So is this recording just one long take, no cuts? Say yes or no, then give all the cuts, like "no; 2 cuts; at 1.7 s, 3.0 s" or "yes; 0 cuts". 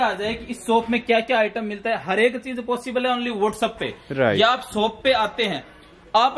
yes; 0 cuts